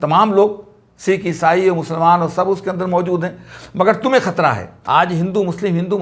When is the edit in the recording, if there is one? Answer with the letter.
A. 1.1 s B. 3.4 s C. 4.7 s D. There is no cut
C